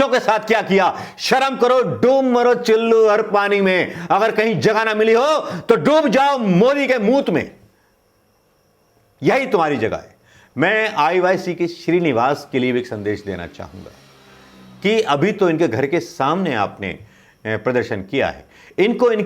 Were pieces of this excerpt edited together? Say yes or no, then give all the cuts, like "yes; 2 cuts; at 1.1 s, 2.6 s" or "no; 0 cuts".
no; 0 cuts